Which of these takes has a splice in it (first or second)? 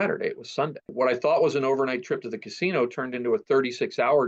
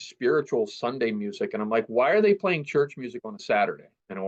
first